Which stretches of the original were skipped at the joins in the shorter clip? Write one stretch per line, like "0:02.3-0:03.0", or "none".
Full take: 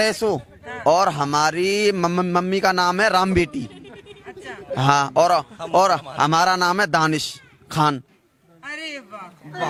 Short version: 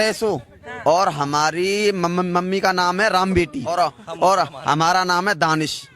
0:03.7-0:05.3